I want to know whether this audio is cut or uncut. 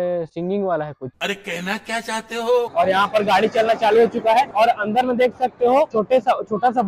cut